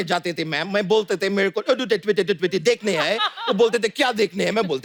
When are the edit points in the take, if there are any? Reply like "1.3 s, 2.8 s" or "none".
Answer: none